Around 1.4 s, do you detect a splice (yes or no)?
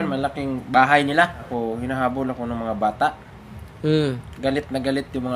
yes